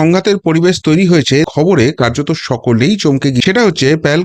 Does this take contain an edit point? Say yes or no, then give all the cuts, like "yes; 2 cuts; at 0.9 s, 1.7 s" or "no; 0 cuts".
yes; 2 cuts; at 1.5 s, 3.4 s